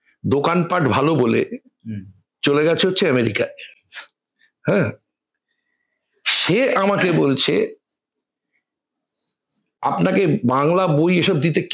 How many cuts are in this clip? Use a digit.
0